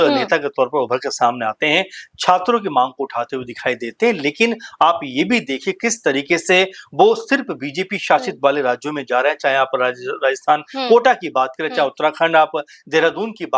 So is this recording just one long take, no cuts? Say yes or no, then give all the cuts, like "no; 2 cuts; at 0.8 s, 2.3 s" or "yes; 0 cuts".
yes; 0 cuts